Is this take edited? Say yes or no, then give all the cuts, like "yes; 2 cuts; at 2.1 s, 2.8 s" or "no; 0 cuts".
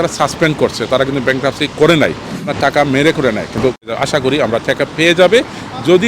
yes; 2 cuts; at 2.4 s, 3.9 s